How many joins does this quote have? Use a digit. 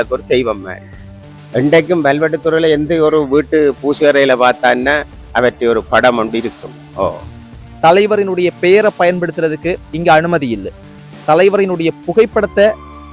1